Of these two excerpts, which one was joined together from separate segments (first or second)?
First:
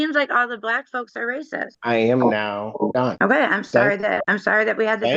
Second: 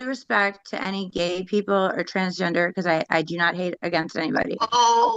first